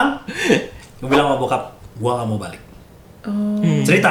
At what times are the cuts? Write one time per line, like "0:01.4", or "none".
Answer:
none